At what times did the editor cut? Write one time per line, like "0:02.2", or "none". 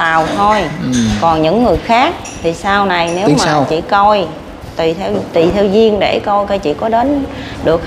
none